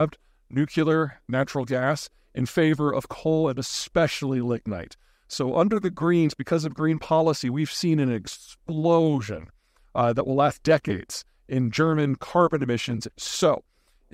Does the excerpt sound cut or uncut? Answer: cut